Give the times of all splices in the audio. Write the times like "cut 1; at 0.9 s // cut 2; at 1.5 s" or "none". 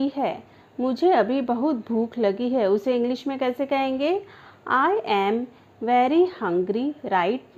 none